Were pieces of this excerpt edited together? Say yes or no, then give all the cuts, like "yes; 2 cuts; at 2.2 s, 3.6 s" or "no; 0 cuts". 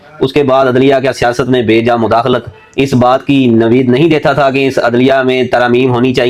no; 0 cuts